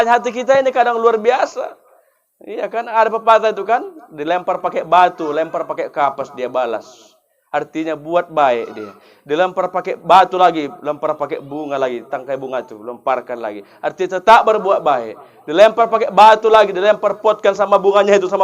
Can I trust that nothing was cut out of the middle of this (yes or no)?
yes